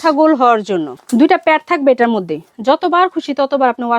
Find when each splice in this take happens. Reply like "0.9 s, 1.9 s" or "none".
0.9 s